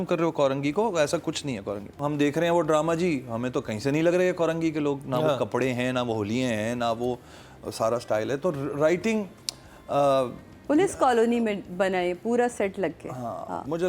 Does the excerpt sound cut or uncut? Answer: cut